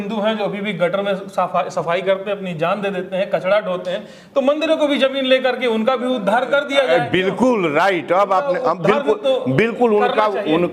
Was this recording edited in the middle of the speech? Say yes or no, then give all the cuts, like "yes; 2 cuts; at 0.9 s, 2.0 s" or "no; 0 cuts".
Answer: no; 0 cuts